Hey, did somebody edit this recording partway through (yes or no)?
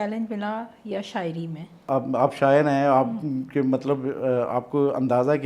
yes